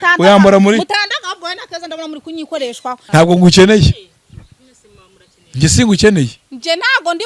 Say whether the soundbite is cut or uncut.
cut